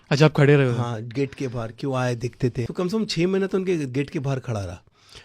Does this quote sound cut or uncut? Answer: cut